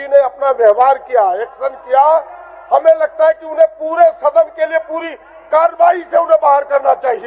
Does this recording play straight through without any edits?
yes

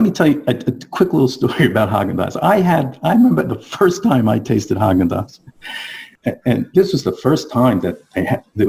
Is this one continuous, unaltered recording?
no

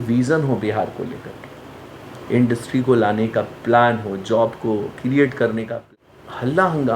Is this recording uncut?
no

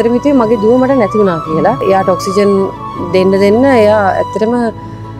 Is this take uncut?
no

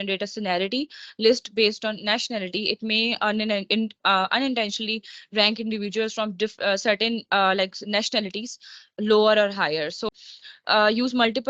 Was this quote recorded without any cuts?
no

